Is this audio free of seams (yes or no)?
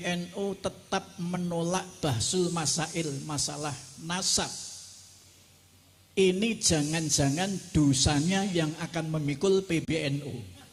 yes